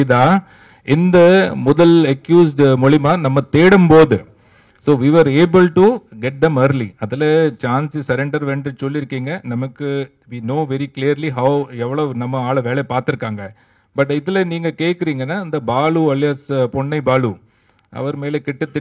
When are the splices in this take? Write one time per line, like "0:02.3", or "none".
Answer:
none

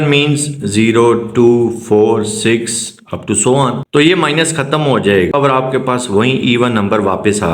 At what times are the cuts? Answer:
0:03.8
0:05.3

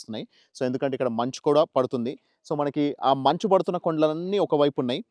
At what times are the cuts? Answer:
none

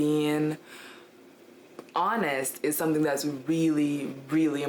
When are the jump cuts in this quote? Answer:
none

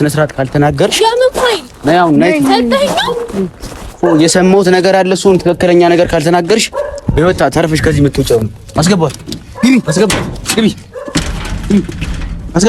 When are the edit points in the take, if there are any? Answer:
none

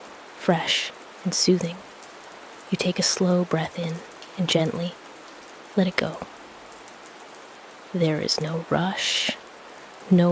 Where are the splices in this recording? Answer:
0:06.3
0:07.9

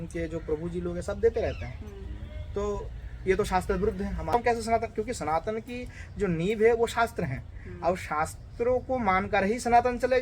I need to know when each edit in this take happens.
0:04.3

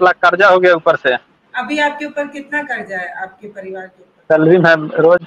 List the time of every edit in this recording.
0:01.4
0:04.1

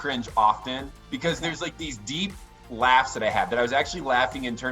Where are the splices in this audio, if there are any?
0:00.9

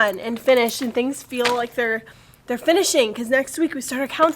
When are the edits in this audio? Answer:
0:03.1

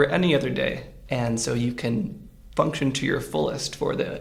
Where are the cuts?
none

